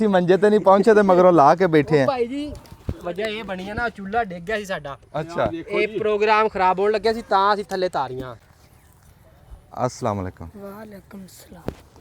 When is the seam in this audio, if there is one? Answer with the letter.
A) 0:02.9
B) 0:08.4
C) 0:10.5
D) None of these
B